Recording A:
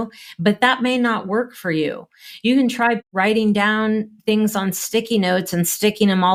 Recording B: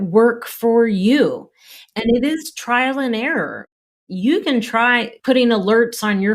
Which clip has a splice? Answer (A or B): B